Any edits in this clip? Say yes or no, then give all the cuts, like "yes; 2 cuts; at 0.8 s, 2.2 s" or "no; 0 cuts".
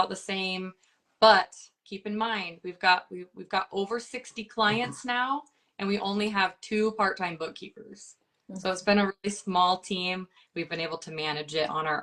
no; 0 cuts